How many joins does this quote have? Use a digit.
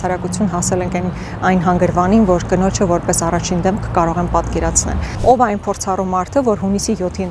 1